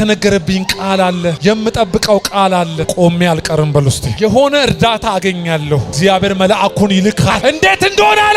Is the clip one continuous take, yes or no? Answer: no